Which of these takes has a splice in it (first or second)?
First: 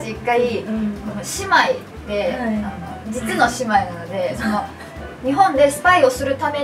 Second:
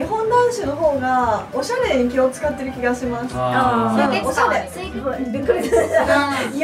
second